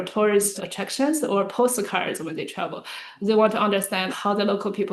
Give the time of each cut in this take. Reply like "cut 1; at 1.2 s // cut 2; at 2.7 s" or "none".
none

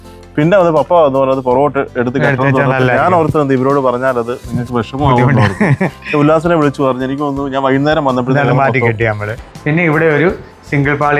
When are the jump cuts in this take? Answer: cut 1; at 9.4 s

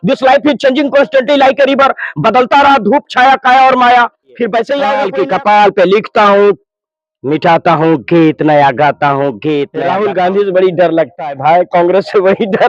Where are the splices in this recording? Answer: cut 1; at 5.0 s // cut 2; at 9.8 s

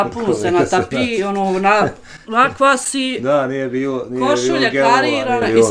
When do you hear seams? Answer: none

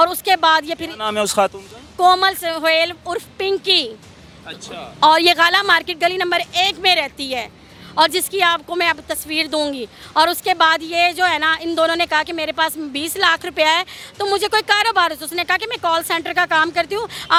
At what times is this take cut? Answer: none

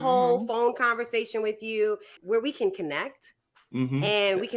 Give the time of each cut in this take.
cut 1; at 2.2 s

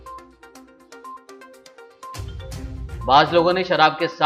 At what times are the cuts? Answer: cut 1; at 2.6 s

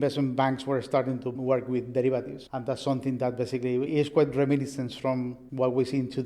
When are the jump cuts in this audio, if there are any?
cut 1; at 1.3 s // cut 2; at 3.9 s

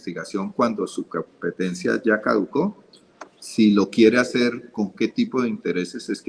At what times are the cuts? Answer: none

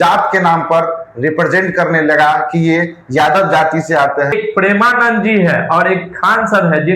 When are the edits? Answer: cut 1; at 4.3 s

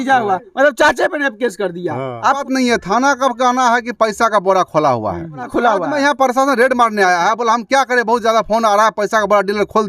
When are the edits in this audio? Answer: cut 1; at 2.4 s // cut 2; at 5.5 s

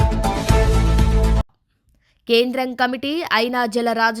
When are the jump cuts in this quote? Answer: cut 1; at 1.2 s

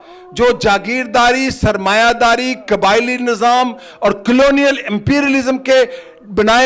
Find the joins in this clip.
none

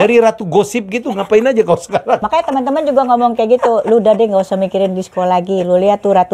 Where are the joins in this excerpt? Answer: cut 1; at 2.2 s

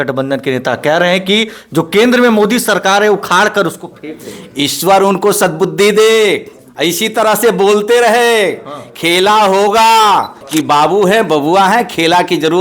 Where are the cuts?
cut 1; at 10.4 s

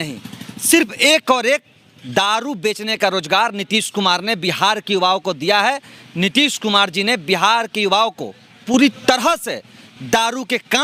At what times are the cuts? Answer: none

